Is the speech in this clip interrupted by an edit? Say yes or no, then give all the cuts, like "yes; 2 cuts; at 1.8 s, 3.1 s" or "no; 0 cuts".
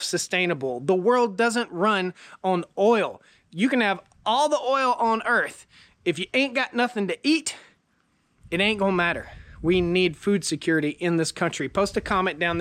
no; 0 cuts